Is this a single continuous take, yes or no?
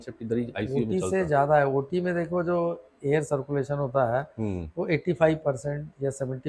yes